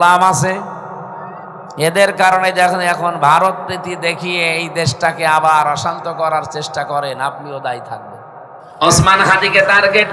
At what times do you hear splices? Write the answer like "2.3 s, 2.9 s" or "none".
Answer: 8.6 s